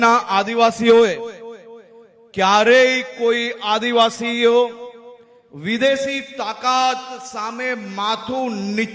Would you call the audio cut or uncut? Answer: uncut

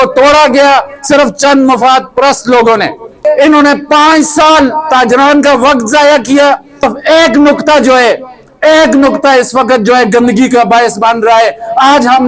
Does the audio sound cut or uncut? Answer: cut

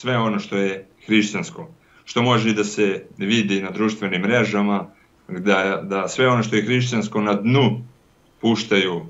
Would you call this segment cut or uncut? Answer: uncut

